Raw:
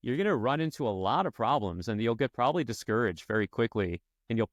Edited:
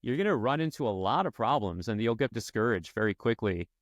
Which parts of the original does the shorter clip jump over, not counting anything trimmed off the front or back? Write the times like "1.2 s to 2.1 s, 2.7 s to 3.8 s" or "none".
2.3 s to 2.7 s